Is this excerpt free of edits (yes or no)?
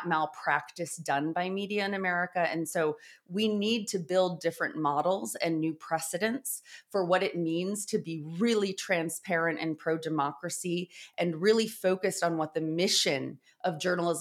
yes